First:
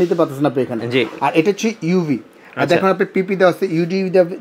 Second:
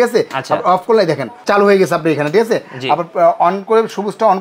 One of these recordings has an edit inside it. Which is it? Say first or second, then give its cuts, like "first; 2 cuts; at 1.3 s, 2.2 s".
second; 1 cut; at 1.3 s